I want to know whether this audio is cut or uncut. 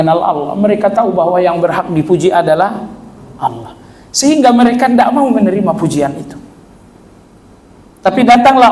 uncut